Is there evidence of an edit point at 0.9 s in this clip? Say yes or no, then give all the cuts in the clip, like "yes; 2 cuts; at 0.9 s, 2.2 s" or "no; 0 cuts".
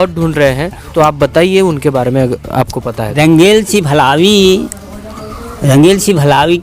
yes; 1 cut; at 0.9 s